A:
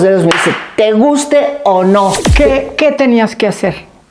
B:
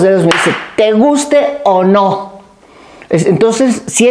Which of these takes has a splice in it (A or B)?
A